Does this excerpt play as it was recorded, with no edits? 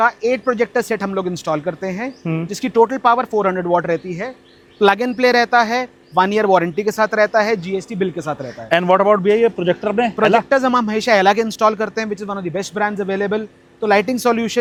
yes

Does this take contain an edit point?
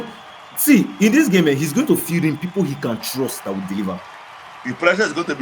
yes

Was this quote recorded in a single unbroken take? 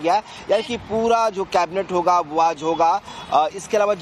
yes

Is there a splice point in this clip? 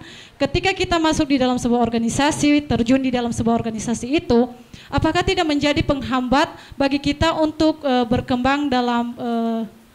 no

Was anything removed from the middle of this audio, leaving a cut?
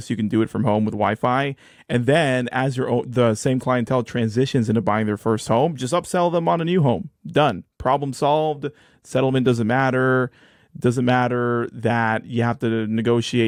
no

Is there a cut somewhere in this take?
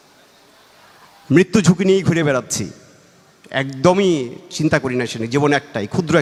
no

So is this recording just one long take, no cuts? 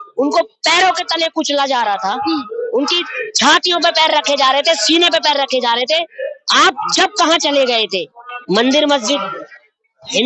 no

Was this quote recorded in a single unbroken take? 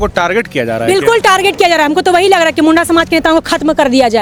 yes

